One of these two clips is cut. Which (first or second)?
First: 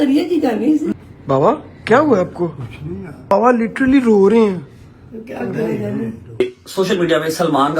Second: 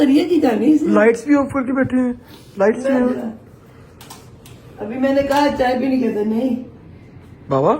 first